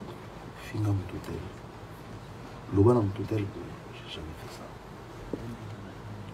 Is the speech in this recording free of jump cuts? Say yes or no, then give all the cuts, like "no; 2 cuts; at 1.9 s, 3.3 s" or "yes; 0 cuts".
yes; 0 cuts